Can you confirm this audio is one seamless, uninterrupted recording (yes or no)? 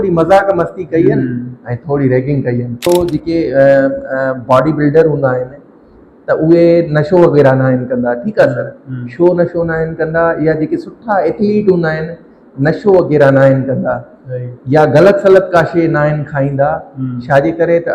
no